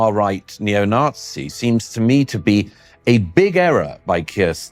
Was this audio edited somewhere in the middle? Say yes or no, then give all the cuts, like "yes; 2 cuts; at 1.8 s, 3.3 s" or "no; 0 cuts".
no; 0 cuts